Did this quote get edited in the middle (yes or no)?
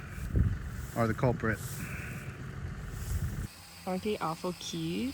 yes